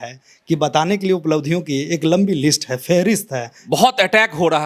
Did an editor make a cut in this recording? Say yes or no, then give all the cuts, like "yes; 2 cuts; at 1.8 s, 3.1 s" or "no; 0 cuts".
yes; 1 cut; at 3.6 s